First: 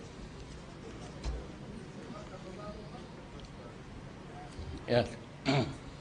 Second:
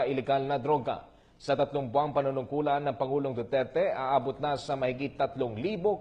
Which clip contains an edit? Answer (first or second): first